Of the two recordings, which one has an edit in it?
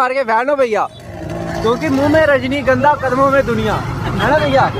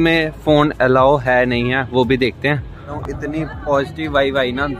second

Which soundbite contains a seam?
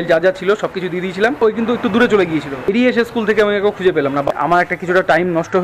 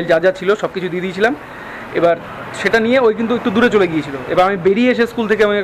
first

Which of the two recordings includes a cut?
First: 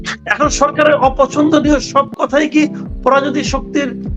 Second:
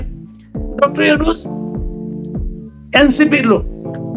second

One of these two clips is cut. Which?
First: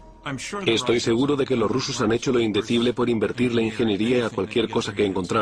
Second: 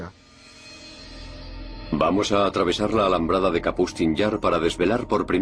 first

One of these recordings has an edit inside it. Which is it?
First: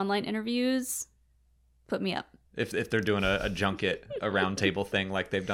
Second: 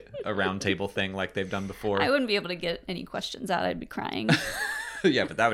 first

